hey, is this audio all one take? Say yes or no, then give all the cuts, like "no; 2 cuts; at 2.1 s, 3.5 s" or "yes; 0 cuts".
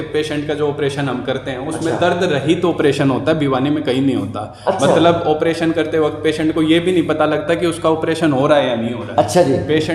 yes; 0 cuts